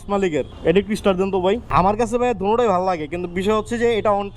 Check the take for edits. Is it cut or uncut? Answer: cut